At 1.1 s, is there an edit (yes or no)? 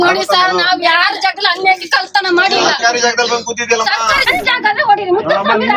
no